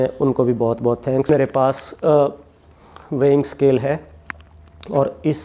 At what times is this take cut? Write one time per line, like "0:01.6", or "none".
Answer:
0:01.3